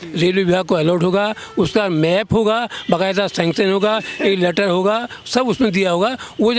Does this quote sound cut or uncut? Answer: uncut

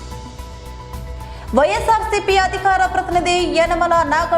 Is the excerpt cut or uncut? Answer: cut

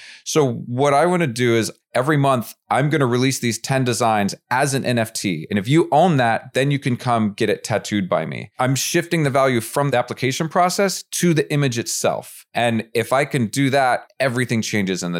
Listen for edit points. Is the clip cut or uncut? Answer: cut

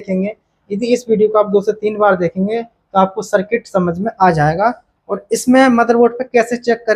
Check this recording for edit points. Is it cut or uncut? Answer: uncut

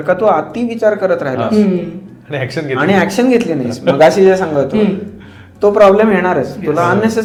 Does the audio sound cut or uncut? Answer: uncut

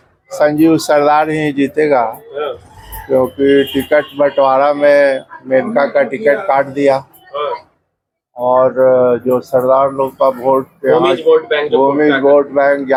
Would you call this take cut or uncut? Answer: uncut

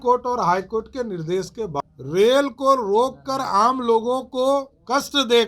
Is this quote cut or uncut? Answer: cut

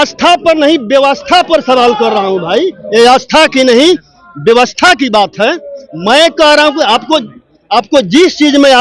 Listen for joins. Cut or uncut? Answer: uncut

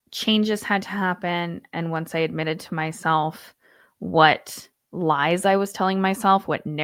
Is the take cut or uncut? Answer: uncut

